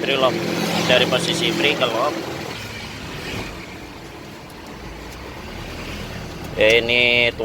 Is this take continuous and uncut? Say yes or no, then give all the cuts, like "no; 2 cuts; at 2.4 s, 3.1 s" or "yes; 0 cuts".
no; 1 cut; at 2.5 s